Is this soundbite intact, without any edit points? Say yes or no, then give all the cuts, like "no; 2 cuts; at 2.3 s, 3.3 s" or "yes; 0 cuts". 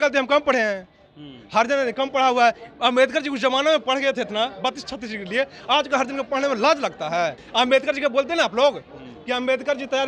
no; 1 cut; at 7.4 s